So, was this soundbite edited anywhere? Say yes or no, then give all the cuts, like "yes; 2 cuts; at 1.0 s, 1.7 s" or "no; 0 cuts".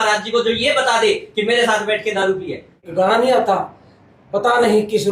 yes; 1 cut; at 2.8 s